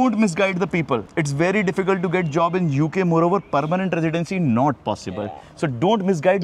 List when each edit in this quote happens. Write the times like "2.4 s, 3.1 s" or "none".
none